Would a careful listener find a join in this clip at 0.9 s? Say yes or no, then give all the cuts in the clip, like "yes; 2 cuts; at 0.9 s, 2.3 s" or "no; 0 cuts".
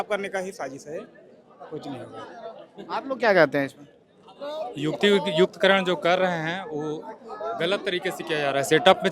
no; 0 cuts